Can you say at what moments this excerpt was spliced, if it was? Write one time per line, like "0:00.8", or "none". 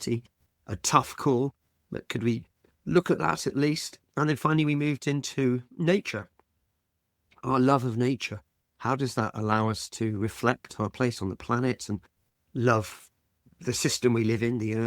none